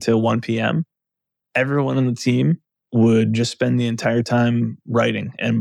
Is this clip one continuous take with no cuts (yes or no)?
yes